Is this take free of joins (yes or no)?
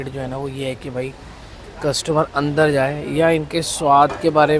yes